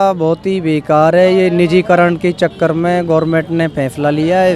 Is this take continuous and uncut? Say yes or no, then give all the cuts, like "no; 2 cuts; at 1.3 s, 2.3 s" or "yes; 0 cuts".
yes; 0 cuts